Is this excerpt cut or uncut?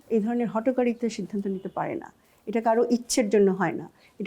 uncut